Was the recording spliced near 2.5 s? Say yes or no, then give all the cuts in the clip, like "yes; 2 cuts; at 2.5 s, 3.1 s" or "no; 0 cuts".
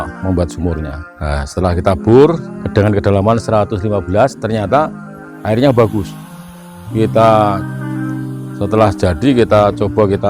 yes; 2 cuts; at 1.0 s, 2.5 s